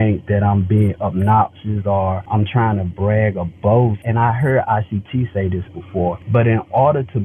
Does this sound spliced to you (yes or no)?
yes